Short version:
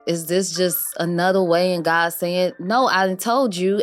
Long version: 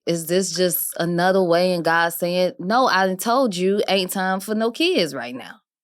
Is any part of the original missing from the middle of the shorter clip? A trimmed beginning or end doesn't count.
no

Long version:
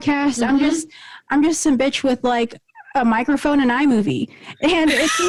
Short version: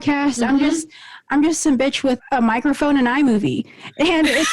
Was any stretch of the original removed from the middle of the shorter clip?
yes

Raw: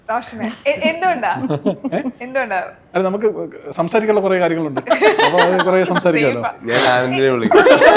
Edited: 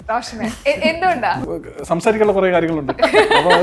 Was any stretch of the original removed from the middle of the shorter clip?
yes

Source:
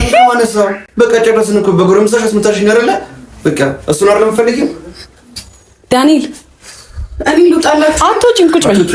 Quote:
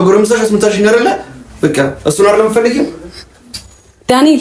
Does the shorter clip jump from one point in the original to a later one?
no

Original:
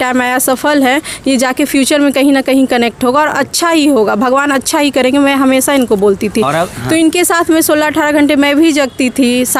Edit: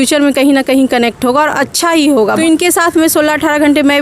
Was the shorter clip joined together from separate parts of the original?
yes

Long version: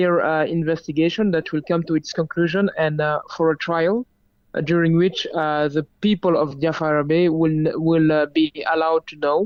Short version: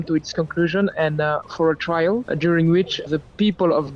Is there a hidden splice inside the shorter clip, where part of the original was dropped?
yes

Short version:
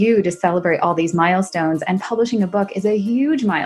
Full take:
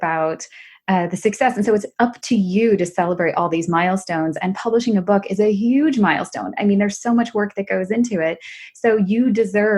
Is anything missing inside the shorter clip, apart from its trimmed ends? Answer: no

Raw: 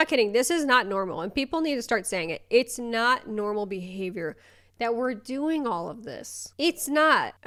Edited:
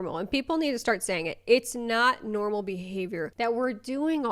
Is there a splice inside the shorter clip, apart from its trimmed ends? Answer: yes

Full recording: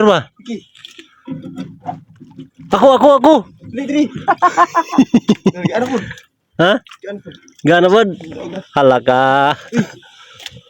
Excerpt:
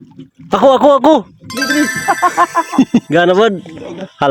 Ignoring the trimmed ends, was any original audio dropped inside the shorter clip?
yes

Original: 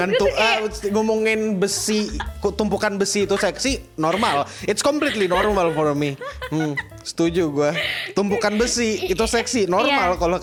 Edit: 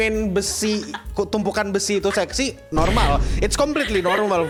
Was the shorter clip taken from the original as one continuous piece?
yes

